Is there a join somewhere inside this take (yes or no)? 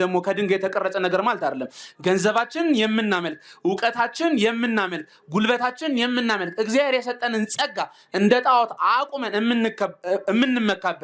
no